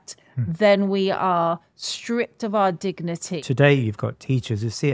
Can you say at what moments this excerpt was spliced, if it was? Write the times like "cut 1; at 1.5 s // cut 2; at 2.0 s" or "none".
cut 1; at 3.4 s